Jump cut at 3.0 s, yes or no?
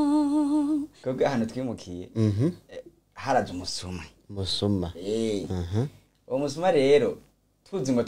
no